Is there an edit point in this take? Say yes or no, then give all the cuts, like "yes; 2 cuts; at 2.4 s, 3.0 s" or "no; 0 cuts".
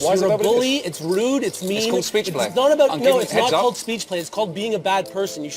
no; 0 cuts